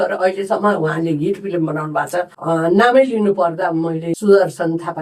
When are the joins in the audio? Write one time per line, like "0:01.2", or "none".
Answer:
0:02.3
0:04.1